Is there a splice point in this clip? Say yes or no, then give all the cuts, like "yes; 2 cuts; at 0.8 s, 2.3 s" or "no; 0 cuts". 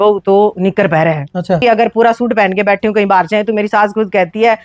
yes; 1 cut; at 1.6 s